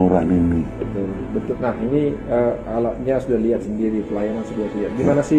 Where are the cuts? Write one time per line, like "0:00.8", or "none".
0:01.4